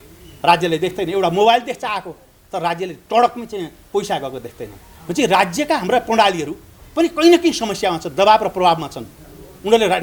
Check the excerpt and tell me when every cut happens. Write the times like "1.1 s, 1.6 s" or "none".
none